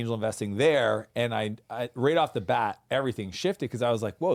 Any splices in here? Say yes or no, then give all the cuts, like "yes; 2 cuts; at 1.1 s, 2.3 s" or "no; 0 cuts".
no; 0 cuts